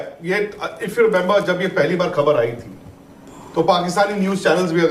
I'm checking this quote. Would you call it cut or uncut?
uncut